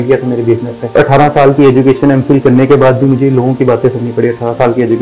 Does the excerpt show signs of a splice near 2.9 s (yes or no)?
no